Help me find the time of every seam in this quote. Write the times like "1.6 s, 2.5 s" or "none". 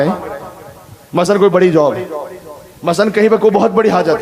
none